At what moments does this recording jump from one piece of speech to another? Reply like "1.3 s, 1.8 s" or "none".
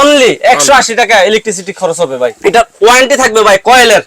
2.4 s